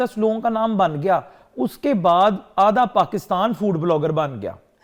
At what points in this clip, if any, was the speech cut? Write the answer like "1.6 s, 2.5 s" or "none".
none